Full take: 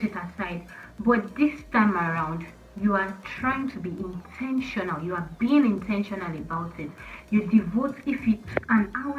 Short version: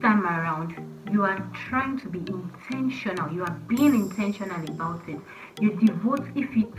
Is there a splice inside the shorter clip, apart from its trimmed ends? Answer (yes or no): no